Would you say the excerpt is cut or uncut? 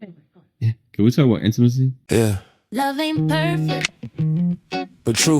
cut